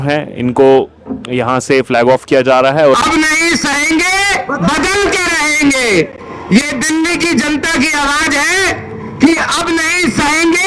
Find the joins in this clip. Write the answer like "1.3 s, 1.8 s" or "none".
3.0 s